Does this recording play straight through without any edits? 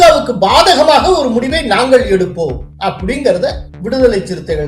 no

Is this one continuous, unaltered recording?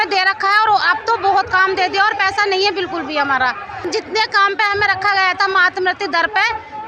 no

